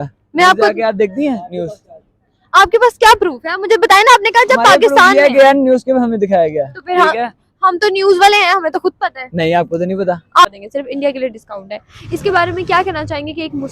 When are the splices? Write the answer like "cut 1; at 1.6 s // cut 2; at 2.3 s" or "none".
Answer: cut 1; at 10.4 s